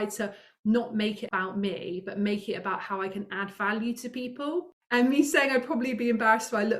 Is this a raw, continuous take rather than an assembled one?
no; 2 cuts; at 1.2 s, 4.8 s

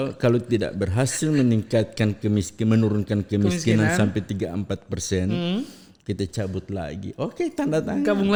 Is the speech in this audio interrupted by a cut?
no; 0 cuts

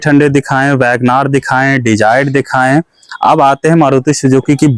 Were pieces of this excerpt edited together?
no; 0 cuts

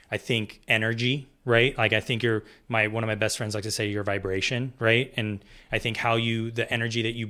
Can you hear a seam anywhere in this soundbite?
no; 0 cuts

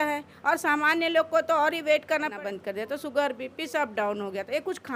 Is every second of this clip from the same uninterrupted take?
no; 1 cut; at 2.3 s

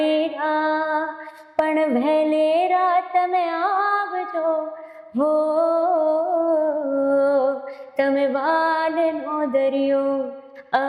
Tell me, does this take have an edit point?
no; 0 cuts

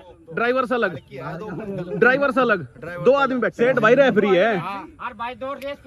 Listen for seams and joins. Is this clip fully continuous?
no; 1 cut; at 3.5 s

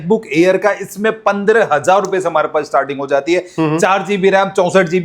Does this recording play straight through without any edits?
yes; 0 cuts

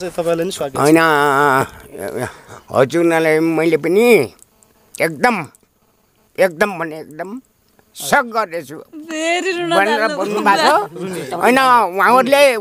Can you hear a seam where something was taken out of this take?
no; 0 cuts

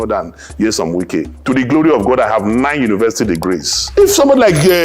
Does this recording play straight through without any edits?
no; 2 cuts; at 1.3 s, 3.8 s

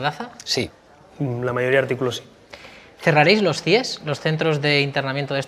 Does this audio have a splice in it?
yes; 1 cut; at 2.3 s

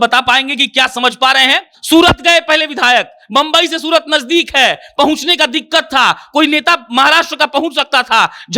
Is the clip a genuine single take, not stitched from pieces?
no; 1 cut; at 1.7 s

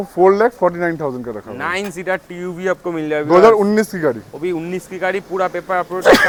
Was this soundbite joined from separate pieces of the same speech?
no; 0 cuts

